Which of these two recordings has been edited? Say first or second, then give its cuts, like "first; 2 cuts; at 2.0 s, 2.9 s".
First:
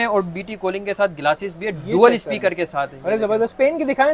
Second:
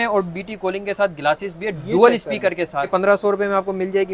second; 1 cut; at 2.9 s